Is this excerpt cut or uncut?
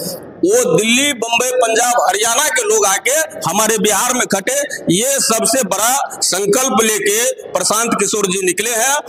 uncut